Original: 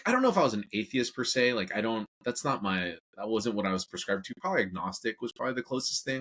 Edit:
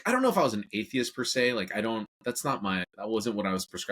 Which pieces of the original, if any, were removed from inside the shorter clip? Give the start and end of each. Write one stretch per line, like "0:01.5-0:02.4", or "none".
0:02.9-0:03.1